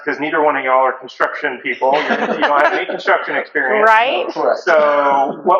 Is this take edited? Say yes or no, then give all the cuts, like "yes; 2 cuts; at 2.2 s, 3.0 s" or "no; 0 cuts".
no; 0 cuts